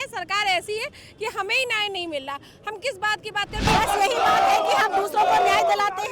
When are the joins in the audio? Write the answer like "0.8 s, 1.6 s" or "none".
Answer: 3.7 s